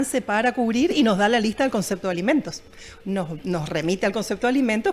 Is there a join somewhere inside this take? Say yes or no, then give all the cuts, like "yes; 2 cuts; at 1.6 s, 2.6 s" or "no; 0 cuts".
no; 0 cuts